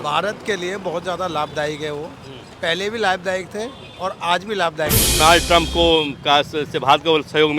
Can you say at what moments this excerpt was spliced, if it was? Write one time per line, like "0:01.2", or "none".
0:05.2